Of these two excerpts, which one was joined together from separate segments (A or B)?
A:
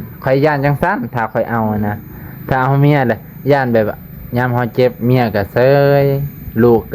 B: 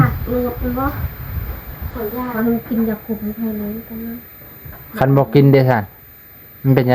B